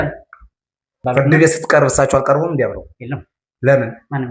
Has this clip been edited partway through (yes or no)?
yes